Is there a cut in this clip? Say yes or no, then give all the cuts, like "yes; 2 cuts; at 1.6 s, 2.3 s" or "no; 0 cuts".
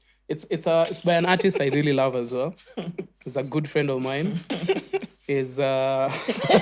no; 0 cuts